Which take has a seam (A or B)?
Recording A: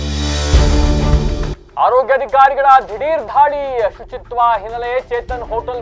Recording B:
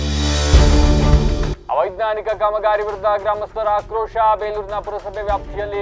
A